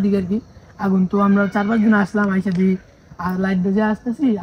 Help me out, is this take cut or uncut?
uncut